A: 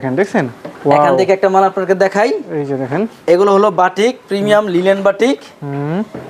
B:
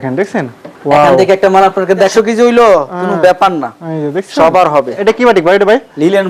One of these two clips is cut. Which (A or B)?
B